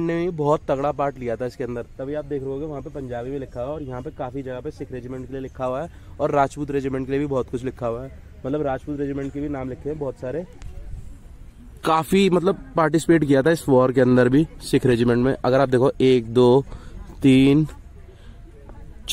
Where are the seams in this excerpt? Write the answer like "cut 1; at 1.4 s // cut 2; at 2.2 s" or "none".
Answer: none